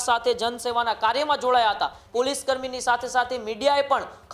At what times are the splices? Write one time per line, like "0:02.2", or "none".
0:02.0